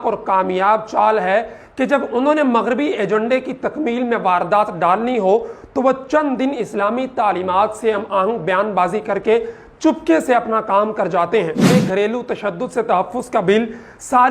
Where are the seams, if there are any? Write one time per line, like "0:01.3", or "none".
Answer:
0:11.7